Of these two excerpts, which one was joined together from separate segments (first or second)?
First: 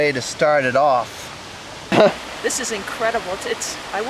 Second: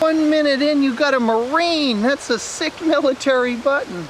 first